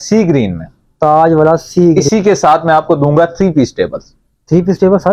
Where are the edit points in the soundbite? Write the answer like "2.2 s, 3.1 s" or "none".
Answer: 2.0 s